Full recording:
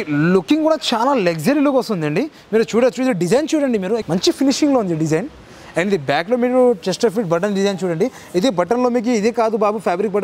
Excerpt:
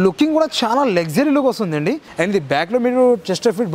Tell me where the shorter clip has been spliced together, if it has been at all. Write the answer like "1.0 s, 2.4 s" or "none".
2.1 s